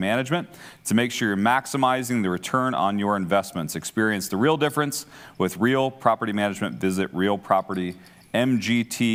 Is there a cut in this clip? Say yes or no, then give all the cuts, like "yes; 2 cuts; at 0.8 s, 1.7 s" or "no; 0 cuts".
no; 0 cuts